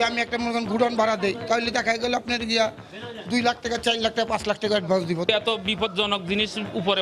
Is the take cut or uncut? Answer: cut